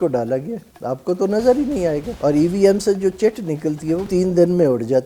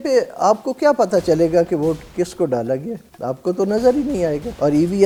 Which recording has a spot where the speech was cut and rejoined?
first; 1 cut; at 4.1 s

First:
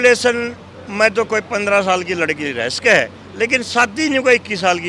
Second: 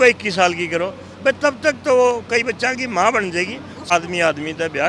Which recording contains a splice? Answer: second; 1 cut; at 3.8 s

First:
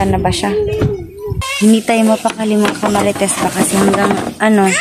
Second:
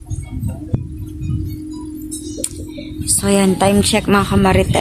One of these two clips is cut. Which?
first; 1 cut; at 1.5 s

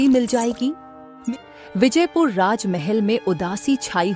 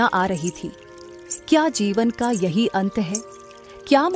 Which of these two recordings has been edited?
first; 1 cut; at 1.1 s

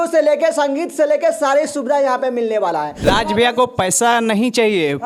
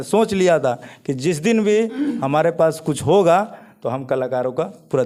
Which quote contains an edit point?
first; 1 cut; at 2.9 s

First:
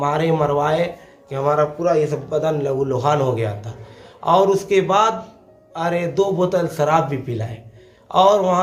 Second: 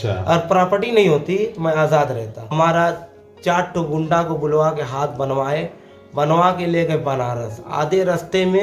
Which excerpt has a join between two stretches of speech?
second; 1 cut; at 2.5 s

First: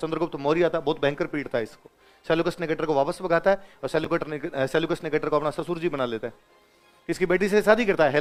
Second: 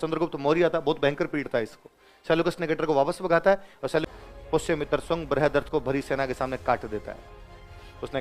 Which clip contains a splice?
second; 1 cut; at 4.1 s

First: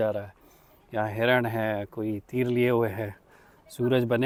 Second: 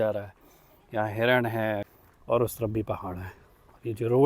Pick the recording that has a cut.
second; 1 cut; at 1.9 s

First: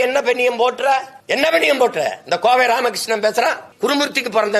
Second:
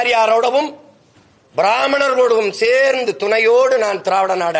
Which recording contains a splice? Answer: first; 2 cuts; at 1.2 s, 3.7 s

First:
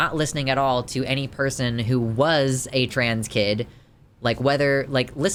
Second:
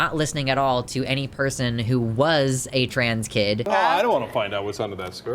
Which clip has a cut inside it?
second; 1 cut; at 3.7 s

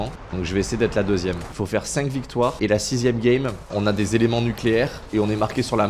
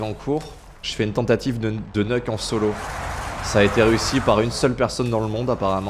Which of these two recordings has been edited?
first; 1 cut; at 1.6 s

